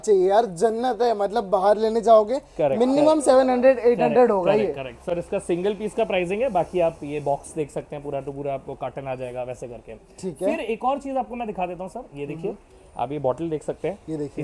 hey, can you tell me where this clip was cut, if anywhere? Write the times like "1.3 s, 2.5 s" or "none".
none